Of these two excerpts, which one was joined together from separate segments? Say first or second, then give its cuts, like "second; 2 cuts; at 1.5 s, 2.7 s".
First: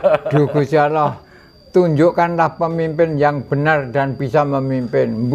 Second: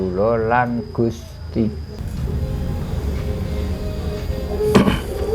second; 1 cut; at 2.0 s